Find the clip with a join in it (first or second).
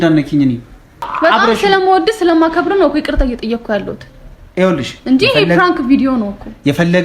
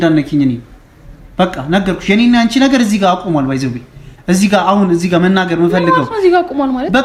first